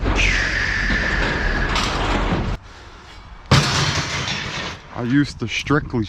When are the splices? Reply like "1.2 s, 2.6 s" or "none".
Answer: 2.6 s